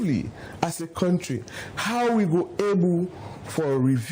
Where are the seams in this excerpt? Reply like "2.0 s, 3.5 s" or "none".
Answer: none